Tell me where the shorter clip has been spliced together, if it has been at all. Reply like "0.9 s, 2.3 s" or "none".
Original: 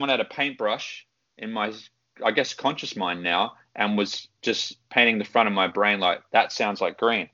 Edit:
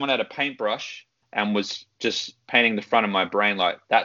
1.2 s